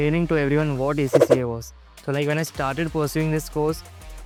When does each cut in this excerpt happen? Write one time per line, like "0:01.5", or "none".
none